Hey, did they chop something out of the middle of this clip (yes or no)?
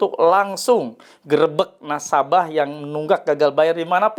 no